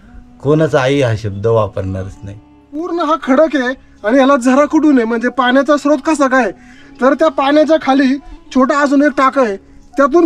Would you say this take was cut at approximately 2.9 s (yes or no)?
yes